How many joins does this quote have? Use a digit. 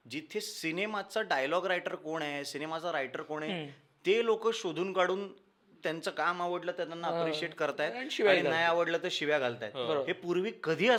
0